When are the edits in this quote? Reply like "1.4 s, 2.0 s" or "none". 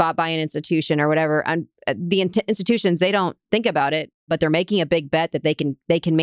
4.2 s